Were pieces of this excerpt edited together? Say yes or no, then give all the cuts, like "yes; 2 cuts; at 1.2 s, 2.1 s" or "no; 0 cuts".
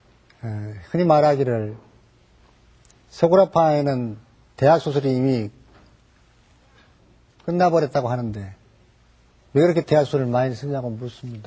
no; 0 cuts